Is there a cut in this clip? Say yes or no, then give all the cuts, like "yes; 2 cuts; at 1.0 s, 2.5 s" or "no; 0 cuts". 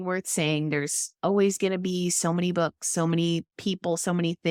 no; 0 cuts